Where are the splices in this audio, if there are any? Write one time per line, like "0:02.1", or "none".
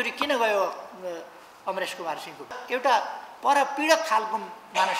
0:02.6